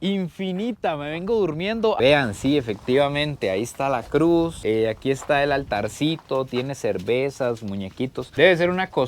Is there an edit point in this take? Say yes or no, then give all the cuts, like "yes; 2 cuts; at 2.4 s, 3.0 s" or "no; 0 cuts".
yes; 1 cut; at 2.0 s